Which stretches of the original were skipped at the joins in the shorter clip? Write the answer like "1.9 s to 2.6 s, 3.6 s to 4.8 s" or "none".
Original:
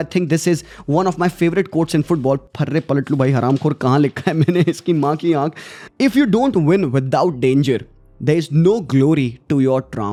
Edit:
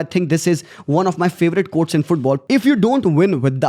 2.4 s to 5.9 s